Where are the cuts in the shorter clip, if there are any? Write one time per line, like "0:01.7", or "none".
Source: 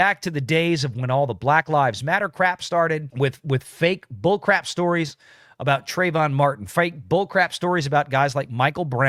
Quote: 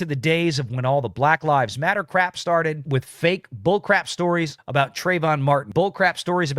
0:02.8
0:04.6
0:05.7